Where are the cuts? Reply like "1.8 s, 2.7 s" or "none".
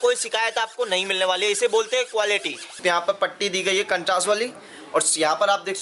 2.7 s